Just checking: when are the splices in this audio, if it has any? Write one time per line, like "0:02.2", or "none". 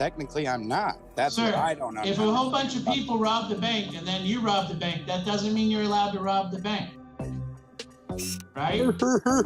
0:01.0